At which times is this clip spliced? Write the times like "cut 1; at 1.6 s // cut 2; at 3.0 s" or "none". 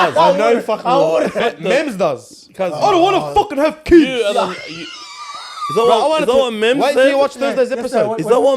cut 1; at 1.4 s